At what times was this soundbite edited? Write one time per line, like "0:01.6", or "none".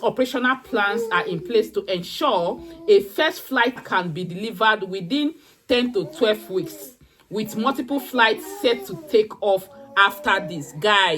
0:03.8